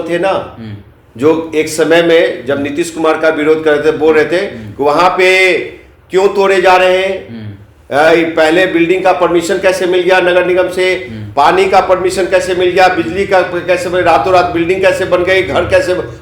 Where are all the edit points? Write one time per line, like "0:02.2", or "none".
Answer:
none